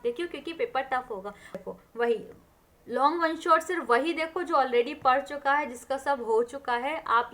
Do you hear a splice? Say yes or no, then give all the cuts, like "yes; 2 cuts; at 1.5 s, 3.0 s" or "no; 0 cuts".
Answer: yes; 1 cut; at 1.6 s